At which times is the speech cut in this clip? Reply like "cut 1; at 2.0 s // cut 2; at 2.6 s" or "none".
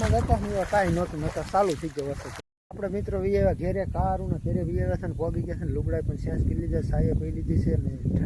cut 1; at 2.5 s

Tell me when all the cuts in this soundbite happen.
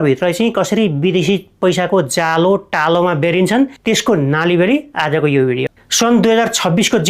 cut 1; at 5.8 s

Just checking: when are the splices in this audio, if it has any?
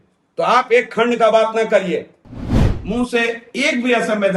cut 1; at 2.7 s

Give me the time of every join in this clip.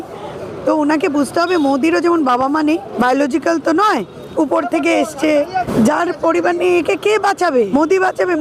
cut 1; at 2.9 s // cut 2; at 5.7 s // cut 3; at 7.7 s

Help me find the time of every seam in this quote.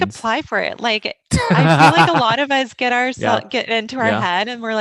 none

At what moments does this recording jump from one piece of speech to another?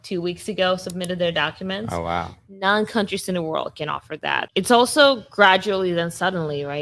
cut 1; at 4.5 s

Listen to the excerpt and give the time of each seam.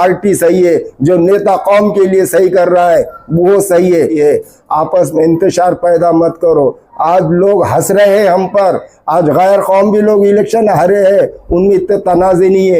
cut 1; at 4.1 s

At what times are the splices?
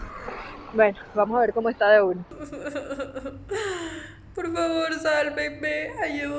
cut 1; at 2.3 s

